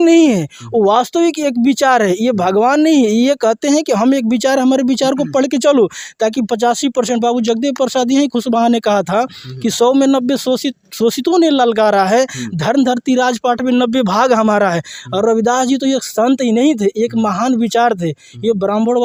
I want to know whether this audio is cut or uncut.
uncut